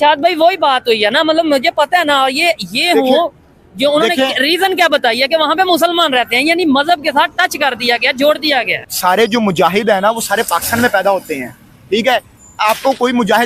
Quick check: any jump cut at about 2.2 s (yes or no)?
no